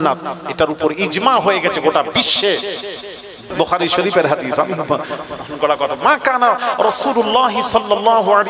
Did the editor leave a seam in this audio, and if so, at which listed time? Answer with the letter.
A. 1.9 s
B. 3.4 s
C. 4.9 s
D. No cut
B